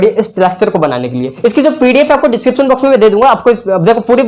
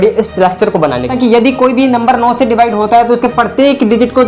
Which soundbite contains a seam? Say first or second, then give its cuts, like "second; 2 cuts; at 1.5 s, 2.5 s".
second; 1 cut; at 1.1 s